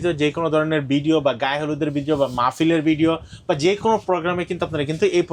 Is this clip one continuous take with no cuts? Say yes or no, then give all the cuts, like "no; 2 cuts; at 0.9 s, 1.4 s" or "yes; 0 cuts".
yes; 0 cuts